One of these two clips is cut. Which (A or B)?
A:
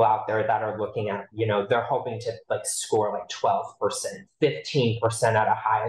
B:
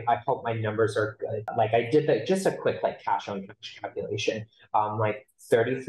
B